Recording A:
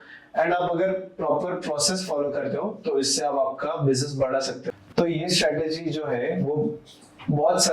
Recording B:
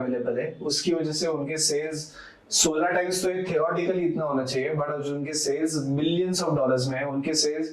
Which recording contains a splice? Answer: A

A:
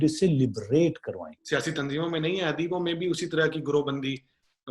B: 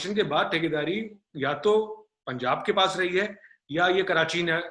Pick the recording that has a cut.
A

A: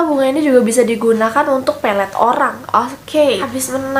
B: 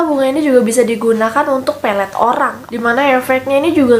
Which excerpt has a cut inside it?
B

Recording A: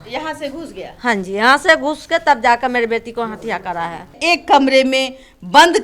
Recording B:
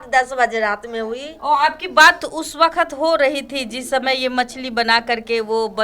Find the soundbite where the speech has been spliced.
A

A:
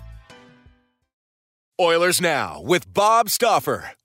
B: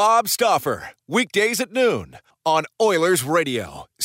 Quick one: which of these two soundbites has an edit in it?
A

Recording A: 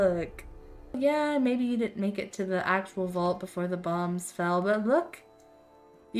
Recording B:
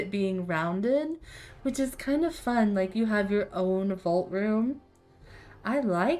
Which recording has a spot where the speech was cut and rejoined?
A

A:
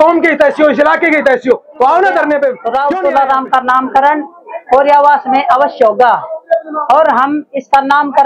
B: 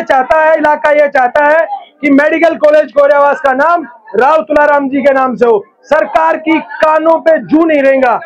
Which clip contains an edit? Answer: A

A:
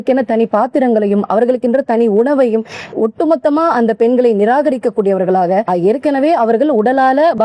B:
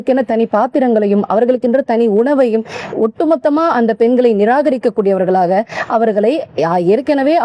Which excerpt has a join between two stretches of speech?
A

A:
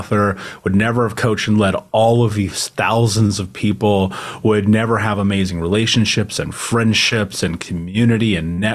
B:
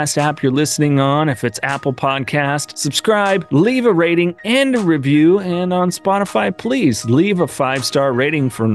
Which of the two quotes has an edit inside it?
B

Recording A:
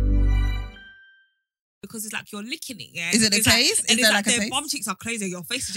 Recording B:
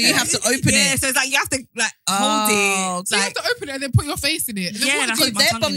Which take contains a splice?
A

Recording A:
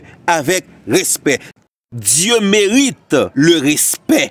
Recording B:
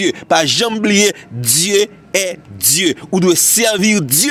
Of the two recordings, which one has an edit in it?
A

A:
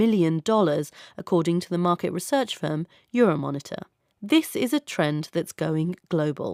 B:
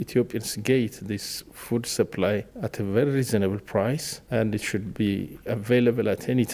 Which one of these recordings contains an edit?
B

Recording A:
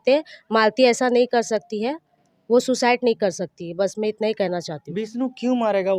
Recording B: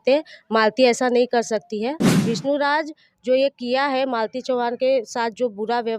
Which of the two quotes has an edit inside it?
B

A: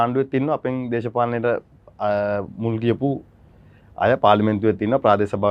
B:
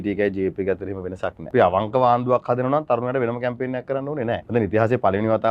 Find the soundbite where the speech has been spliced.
B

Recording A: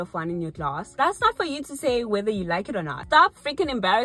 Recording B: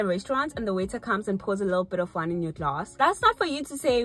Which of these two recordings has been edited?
A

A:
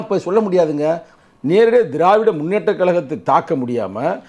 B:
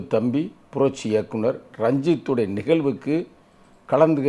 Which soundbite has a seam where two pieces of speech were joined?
A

